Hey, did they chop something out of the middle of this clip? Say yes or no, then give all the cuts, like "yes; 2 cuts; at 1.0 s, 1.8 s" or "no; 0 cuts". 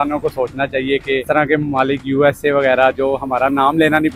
yes; 1 cut; at 1.2 s